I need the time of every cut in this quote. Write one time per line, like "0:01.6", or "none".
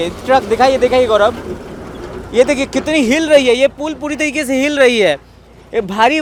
none